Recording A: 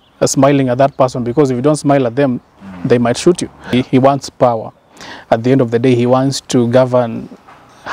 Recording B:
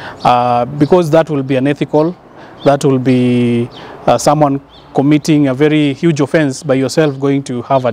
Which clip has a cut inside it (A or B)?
A